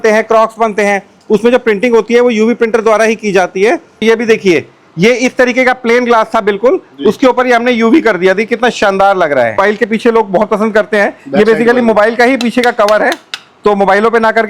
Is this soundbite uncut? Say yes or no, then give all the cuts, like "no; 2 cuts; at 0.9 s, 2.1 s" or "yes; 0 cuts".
no; 2 cuts; at 4.0 s, 9.6 s